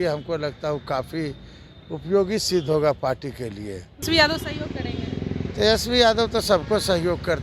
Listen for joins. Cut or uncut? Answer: cut